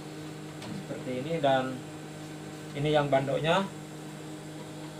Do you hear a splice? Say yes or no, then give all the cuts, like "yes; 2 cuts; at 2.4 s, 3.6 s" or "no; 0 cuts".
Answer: no; 0 cuts